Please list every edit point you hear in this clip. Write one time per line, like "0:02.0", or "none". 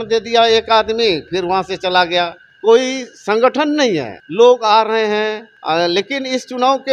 0:02.4
0:04.2
0:05.5